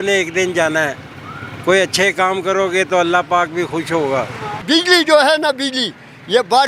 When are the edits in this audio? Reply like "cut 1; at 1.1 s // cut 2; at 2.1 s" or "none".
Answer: none